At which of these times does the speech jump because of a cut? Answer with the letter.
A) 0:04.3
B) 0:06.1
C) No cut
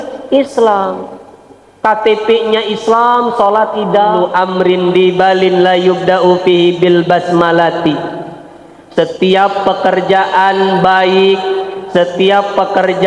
A